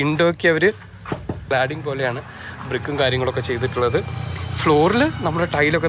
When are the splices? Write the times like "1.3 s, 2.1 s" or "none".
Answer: 1.4 s